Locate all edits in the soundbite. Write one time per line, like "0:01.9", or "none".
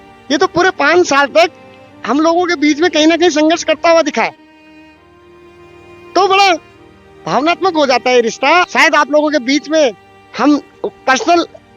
0:08.7